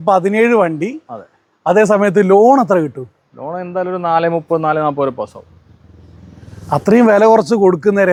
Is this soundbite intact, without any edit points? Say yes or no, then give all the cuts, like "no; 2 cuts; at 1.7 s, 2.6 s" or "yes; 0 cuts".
yes; 0 cuts